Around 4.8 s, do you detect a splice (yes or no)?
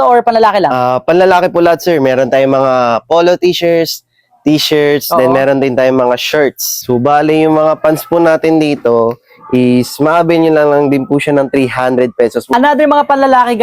no